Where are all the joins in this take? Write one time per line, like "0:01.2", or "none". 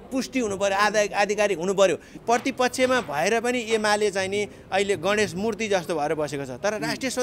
0:02.1